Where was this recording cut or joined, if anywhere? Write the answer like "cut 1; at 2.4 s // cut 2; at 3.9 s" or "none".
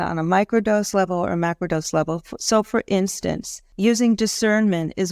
cut 1; at 3.6 s